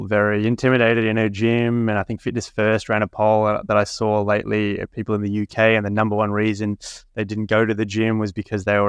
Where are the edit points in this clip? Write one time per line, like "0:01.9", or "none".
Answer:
none